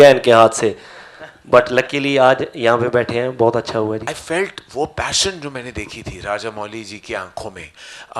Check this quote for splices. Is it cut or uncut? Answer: cut